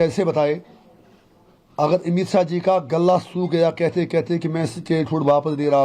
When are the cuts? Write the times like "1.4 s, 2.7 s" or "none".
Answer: none